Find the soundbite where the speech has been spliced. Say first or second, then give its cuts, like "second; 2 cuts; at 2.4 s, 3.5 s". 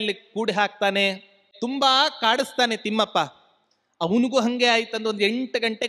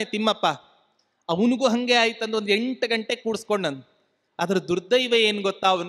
first; 1 cut; at 1.5 s